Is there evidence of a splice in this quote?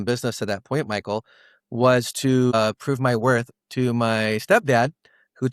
yes; 1 cut; at 2.5 s

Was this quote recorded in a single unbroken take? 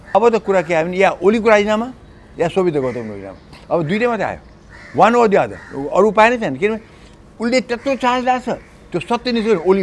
yes; 0 cuts

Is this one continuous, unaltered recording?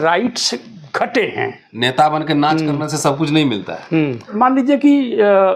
no; 2 cuts; at 1.6 s, 4.3 s

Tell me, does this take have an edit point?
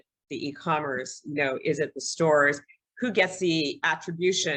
no; 0 cuts

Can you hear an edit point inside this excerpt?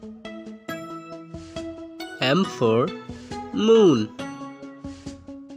yes; 2 cuts; at 1.6 s, 4.1 s

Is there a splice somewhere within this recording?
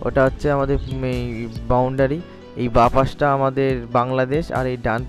no; 0 cuts

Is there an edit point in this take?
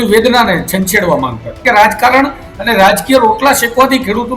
yes; 1 cut; at 1.5 s

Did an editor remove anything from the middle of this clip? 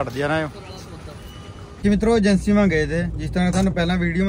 no; 0 cuts

